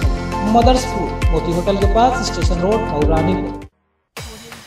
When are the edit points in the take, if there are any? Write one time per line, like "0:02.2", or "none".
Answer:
0:03.7